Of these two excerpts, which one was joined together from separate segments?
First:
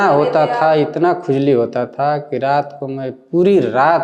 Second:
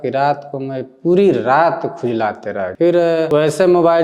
second; 2 cuts; at 2.7 s, 3.3 s

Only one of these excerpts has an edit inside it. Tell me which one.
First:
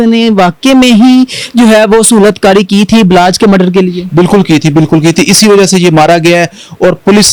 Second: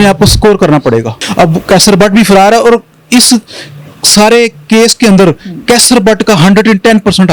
second; 1 cut; at 1.2 s

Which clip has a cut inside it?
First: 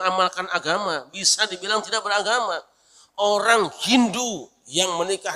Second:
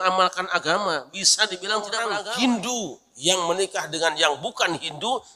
second; 1 cut; at 2.2 s

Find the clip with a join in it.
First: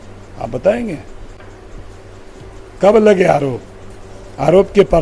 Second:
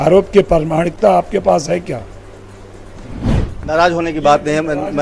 second; 1 cut; at 3.3 s

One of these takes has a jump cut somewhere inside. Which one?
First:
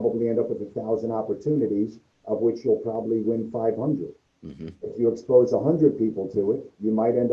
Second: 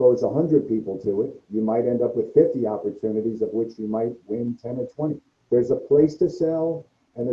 second; 1 cut; at 5.3 s

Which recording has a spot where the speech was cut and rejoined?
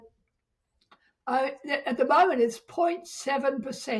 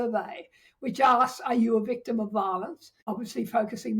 second; 1 cut; at 2.9 s

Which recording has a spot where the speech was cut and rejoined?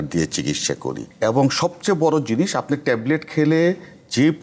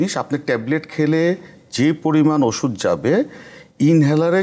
first; 1 cut; at 1.0 s

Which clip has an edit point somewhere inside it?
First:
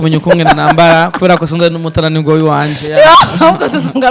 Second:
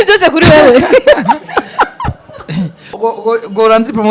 second; 1 cut; at 3.0 s

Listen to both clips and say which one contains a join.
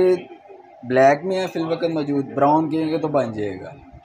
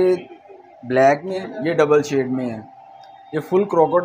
second; 1 cut; at 1.4 s

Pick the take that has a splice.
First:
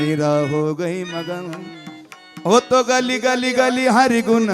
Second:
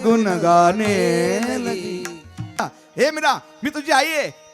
second; 1 cut; at 2.7 s

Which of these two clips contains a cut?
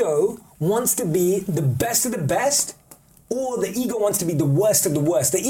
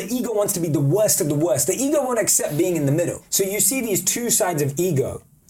second; 1 cut; at 3.2 s

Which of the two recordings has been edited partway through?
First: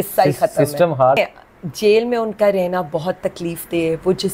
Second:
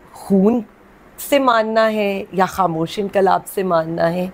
first; 1 cut; at 1.2 s

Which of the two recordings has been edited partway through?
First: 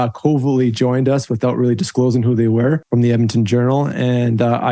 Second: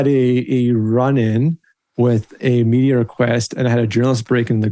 first; 1 cut; at 2.8 s

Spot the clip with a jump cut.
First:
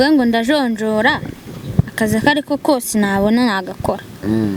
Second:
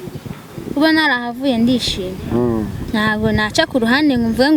second; 1 cut; at 2.8 s

